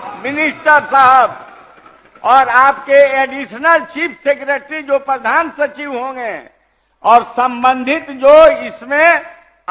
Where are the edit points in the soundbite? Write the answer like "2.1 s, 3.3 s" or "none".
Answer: none